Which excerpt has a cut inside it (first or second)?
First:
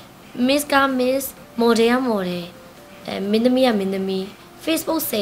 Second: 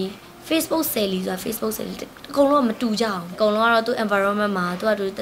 second